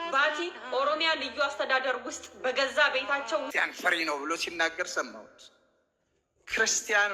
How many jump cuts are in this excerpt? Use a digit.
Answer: 1